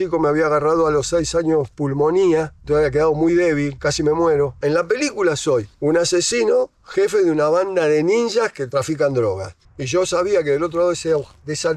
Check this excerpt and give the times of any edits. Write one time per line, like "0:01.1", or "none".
0:04.5
0:09.5

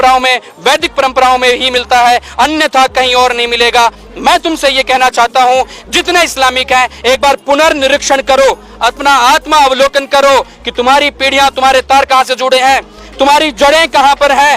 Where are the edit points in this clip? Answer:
none

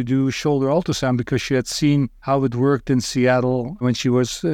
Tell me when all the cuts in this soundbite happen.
0:02.2
0:03.8

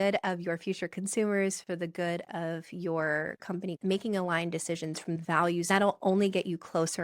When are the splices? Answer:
0:05.3

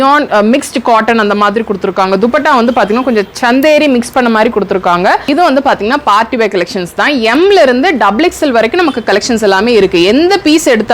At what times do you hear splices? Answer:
0:05.2

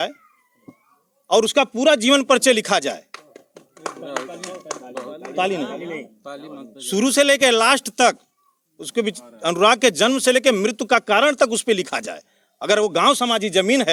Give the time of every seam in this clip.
none

